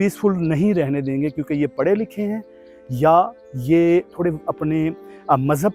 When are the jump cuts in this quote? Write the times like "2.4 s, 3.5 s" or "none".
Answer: none